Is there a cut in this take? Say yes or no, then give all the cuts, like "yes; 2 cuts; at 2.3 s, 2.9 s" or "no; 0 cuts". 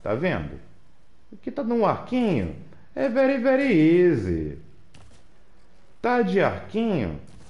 no; 0 cuts